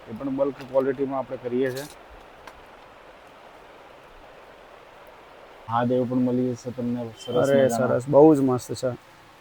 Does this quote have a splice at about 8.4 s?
no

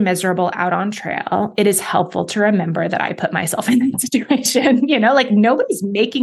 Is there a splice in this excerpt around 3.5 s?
no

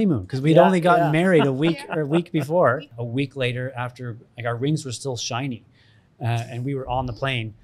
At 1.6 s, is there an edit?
no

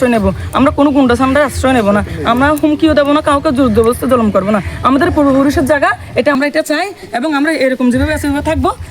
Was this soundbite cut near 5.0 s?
no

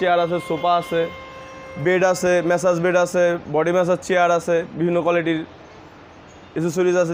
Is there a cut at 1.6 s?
no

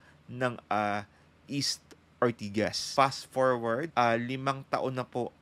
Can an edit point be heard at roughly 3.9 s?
yes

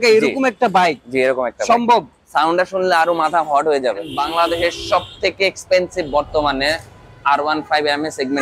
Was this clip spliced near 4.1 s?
yes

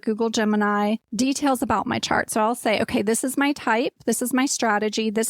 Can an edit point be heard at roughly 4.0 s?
no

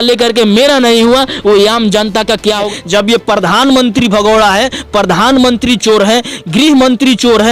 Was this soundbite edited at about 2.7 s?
yes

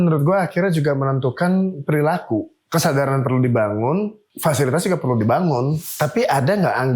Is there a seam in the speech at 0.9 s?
no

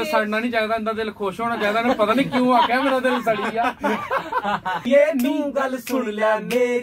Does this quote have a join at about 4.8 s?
yes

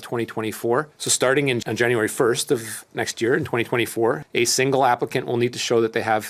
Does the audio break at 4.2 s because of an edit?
yes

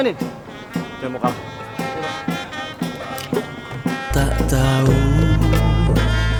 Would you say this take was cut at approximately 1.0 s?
no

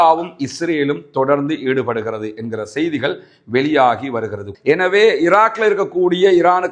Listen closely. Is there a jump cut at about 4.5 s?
yes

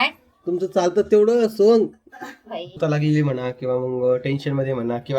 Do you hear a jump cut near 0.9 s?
no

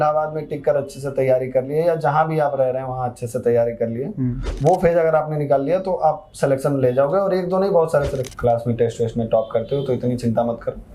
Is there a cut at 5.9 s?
no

